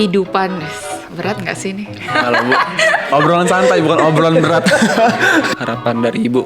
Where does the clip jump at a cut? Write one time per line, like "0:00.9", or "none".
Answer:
0:05.5